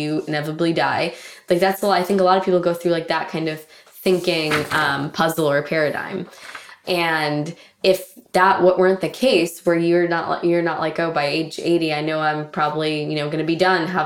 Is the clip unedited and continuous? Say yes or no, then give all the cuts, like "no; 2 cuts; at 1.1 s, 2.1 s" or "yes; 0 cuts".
yes; 0 cuts